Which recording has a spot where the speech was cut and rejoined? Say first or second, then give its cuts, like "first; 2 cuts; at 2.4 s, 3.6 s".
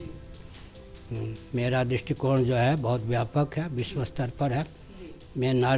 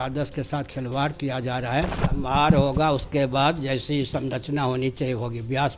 second; 1 cut; at 2.0 s